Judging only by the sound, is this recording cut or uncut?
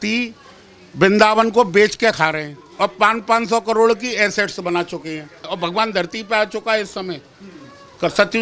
cut